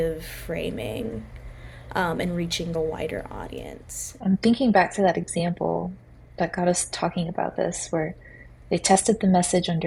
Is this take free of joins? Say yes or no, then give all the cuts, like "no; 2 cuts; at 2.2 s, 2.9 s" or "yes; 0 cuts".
yes; 0 cuts